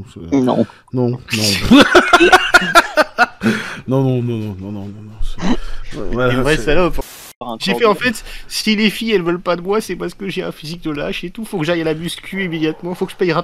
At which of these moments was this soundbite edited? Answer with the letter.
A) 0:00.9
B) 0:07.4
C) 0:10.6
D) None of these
B